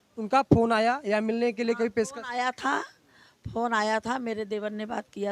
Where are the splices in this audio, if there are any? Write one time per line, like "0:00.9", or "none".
none